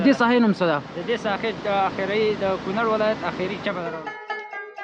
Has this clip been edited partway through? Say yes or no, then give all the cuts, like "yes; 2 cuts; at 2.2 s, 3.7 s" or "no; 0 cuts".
yes; 1 cut; at 3.8 s